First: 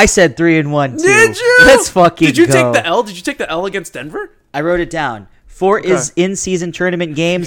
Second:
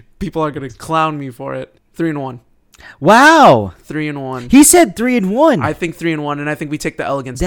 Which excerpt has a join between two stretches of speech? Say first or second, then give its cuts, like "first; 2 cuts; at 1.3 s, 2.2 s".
second; 1 cut; at 1.8 s